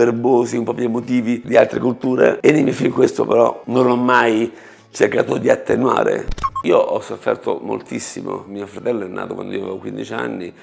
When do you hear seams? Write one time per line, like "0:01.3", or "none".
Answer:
0:01.4
0:06.4
0:08.5